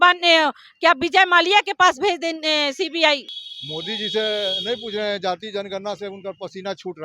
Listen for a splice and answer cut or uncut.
cut